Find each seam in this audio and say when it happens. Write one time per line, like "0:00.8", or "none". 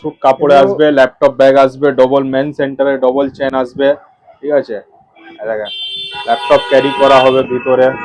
none